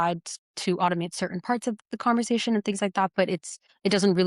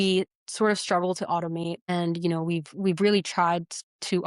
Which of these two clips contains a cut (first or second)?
second